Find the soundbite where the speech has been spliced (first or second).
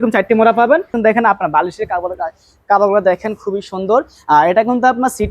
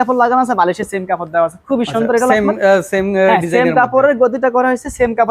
first